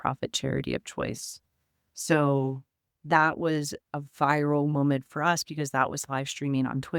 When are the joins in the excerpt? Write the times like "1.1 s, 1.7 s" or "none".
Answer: none